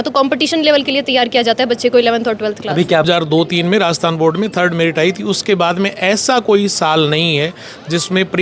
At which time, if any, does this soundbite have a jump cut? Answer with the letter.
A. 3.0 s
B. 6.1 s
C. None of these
A